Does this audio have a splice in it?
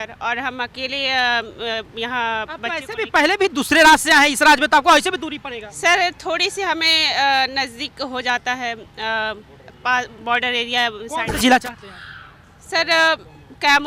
no; 0 cuts

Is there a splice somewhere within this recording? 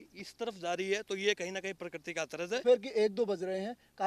yes; 1 cut; at 2.6 s

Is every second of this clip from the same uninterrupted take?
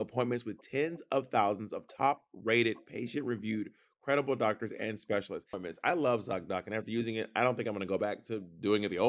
no; 1 cut; at 5.5 s

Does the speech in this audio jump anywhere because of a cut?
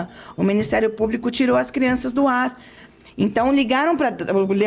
no; 0 cuts

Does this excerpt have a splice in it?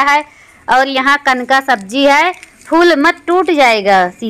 no; 0 cuts

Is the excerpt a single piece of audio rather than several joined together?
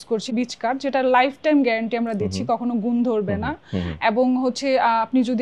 yes; 0 cuts

